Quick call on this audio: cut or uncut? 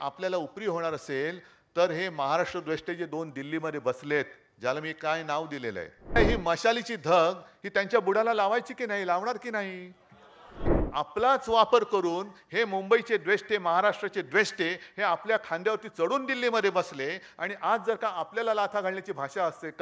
cut